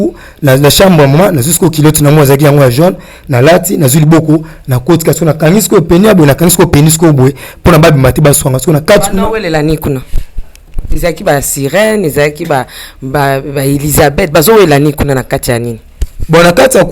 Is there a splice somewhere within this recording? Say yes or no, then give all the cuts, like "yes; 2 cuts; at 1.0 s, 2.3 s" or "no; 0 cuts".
no; 0 cuts